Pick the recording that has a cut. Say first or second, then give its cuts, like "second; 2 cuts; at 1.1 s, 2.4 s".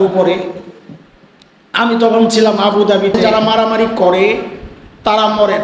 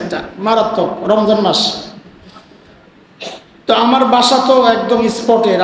first; 1 cut; at 3.2 s